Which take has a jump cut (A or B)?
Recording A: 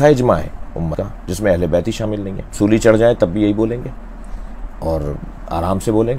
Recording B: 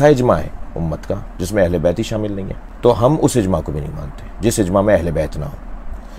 A